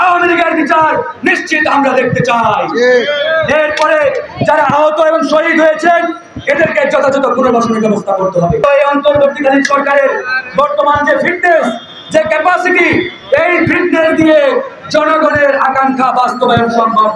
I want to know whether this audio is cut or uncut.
cut